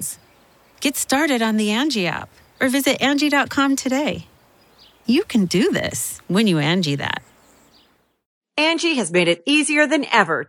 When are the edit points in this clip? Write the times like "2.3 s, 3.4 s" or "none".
8.2 s